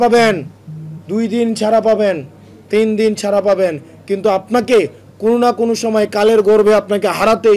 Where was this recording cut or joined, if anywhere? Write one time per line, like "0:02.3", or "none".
none